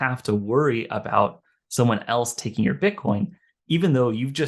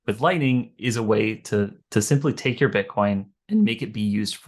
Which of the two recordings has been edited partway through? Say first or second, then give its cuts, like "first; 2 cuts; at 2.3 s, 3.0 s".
second; 1 cut; at 3.4 s